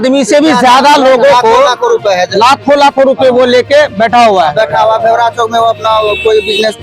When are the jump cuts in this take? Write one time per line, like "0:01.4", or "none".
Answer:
none